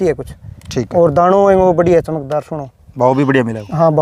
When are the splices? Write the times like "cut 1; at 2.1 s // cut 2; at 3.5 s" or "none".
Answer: none